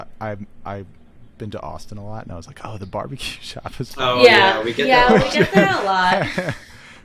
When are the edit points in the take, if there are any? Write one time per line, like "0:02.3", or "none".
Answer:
none